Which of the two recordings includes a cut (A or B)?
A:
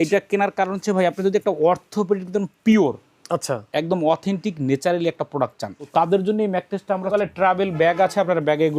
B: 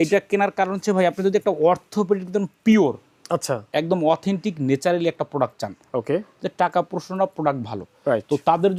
A